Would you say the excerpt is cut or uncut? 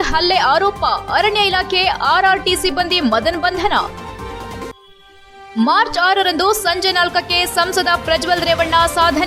uncut